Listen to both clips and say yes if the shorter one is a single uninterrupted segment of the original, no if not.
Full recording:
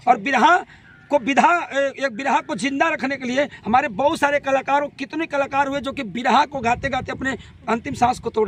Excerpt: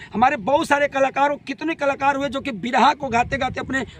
yes